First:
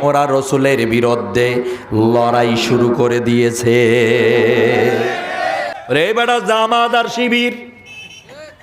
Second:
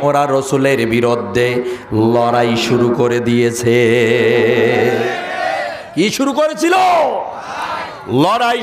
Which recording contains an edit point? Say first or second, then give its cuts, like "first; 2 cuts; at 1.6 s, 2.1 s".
first; 1 cut; at 5.7 s